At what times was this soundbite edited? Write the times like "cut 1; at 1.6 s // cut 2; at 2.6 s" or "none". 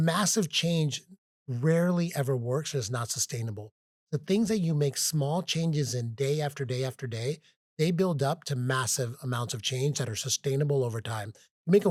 none